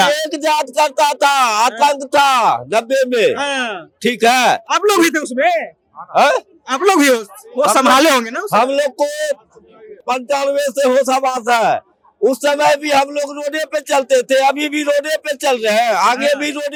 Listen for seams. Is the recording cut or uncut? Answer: uncut